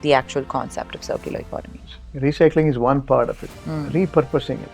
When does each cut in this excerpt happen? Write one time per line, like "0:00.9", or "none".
0:02.0